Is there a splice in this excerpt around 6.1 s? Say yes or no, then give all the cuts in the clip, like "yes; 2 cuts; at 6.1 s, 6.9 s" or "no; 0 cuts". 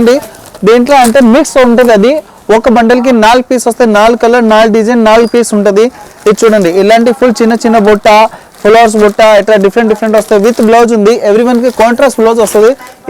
no; 0 cuts